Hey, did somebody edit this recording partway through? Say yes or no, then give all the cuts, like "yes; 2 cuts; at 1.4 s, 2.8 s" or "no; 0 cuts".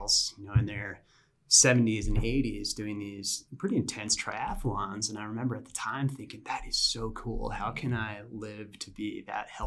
no; 0 cuts